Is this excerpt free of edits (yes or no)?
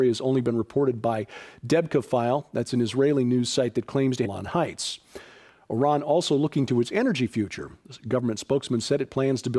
yes